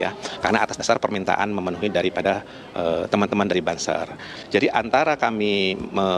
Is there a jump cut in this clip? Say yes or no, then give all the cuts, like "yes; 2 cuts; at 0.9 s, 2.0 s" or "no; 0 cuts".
yes; 1 cut; at 4.3 s